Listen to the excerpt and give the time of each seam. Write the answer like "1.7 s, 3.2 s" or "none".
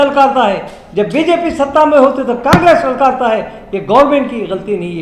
none